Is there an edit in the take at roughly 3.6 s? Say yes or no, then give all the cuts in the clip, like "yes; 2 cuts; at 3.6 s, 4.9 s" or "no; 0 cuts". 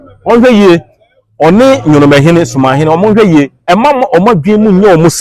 yes; 1 cut; at 3.6 s